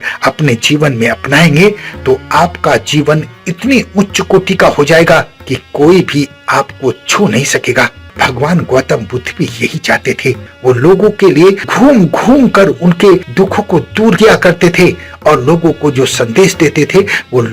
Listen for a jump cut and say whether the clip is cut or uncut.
cut